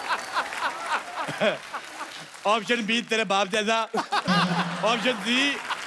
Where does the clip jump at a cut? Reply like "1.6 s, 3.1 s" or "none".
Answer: none